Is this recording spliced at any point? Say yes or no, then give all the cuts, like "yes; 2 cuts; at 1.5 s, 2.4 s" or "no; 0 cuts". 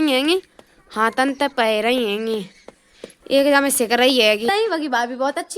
yes; 1 cut; at 4.5 s